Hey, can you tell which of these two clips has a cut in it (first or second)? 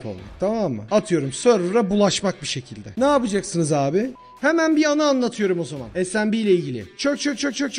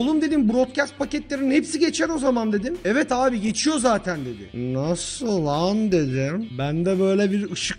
first